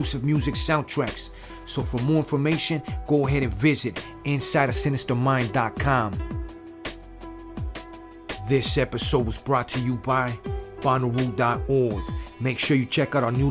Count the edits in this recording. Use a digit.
2